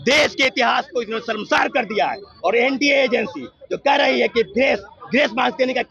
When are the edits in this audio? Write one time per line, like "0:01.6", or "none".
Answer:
none